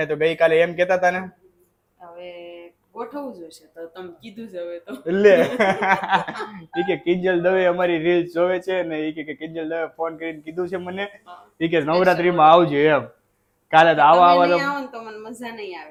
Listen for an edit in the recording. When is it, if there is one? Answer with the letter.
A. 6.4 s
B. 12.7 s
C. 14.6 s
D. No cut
D